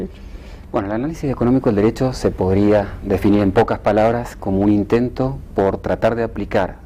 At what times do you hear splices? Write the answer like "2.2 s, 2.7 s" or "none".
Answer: 2.1 s